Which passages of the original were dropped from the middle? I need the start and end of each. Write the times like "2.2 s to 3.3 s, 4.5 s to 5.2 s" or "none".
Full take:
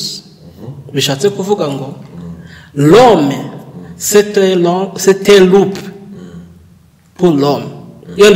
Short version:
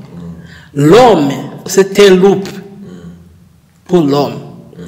3.6 s to 4.9 s